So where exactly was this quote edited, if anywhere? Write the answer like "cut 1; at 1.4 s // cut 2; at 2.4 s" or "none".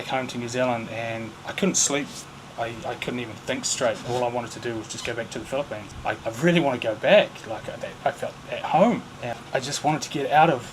cut 1; at 6.2 s // cut 2; at 9.2 s